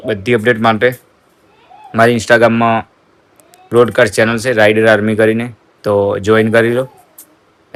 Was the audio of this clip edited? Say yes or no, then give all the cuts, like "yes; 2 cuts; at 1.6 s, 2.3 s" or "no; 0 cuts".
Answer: no; 0 cuts